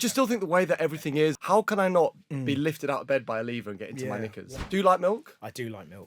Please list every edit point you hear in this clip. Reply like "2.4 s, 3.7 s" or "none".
1.4 s, 4.6 s